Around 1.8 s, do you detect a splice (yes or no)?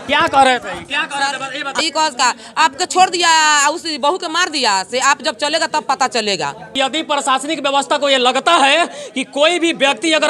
yes